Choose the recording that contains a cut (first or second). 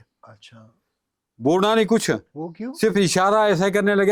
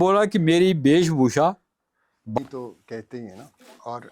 second